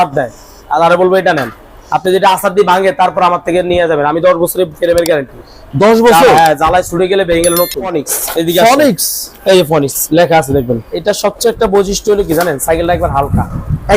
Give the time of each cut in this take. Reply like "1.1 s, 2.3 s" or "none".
8.1 s, 10.9 s